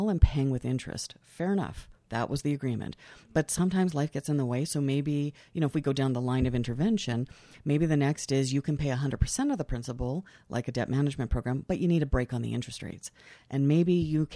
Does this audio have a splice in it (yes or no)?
no